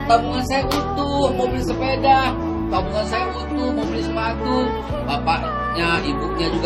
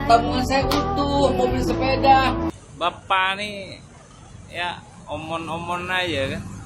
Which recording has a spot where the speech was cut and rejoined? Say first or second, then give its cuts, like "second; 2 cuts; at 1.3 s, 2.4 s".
second; 1 cut; at 2.5 s